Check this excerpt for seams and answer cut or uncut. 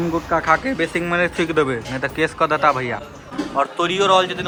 uncut